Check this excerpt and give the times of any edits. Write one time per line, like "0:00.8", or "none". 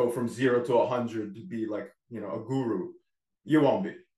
none